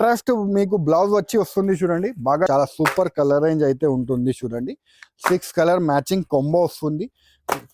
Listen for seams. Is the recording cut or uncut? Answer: cut